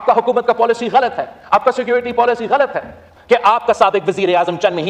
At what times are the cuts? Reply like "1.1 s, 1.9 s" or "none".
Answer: 3.0 s